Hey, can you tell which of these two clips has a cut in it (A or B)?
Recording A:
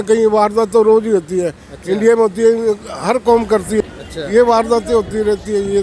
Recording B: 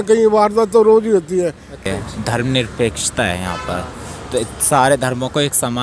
B